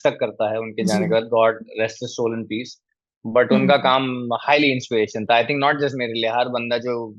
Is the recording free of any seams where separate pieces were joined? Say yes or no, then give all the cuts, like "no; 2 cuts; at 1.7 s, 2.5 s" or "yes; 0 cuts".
yes; 0 cuts